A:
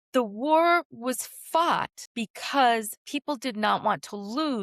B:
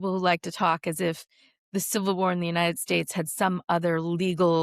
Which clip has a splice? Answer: A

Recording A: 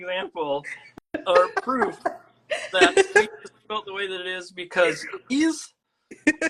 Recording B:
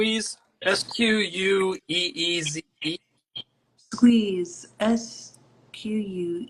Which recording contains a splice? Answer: A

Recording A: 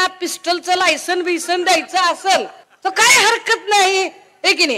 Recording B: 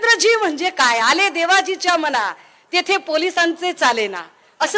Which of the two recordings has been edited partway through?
A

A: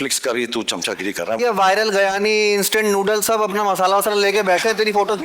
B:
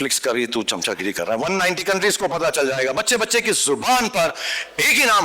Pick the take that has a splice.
A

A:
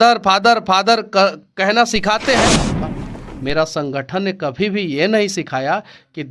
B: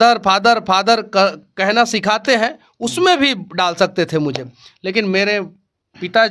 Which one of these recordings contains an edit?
A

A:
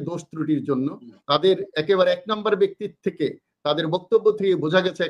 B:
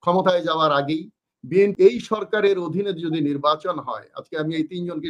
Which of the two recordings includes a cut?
B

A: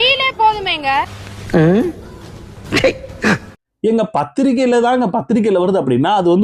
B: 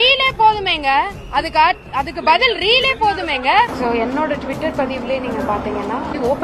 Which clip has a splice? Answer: B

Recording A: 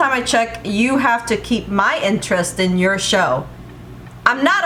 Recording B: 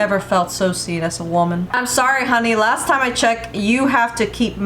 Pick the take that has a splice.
B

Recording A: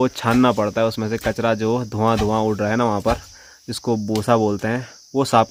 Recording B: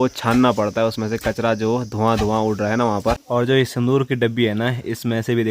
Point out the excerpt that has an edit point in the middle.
B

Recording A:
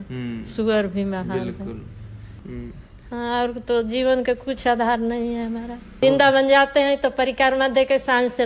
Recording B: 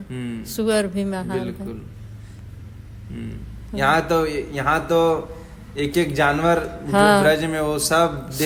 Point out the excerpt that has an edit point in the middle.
A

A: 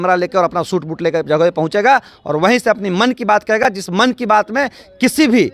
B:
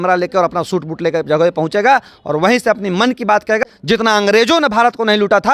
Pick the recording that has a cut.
B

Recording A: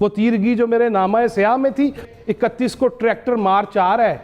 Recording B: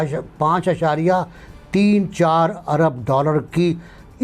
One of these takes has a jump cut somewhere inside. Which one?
A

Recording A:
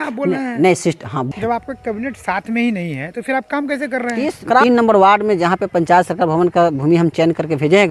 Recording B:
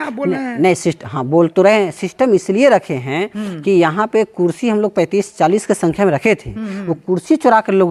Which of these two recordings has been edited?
A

